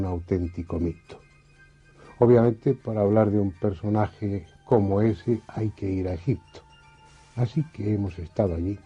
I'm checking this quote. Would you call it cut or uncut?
uncut